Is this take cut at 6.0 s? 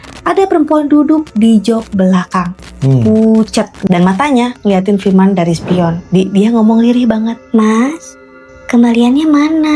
yes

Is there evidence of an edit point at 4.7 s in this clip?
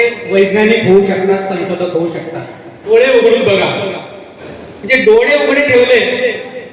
no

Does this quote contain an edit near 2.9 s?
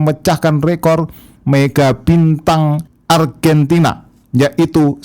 yes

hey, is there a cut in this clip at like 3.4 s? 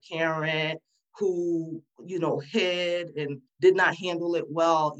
yes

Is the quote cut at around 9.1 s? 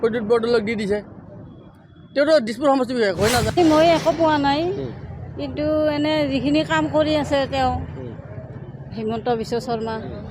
no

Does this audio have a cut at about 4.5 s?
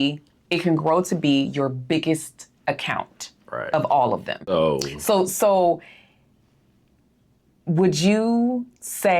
yes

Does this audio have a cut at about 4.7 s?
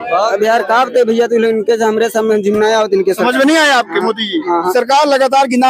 yes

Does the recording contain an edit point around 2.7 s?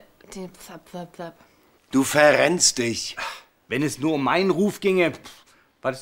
yes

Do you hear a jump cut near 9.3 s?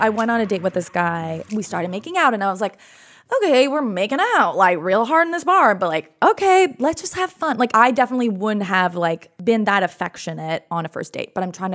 yes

